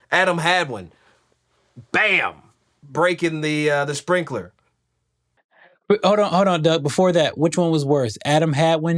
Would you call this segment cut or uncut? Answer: uncut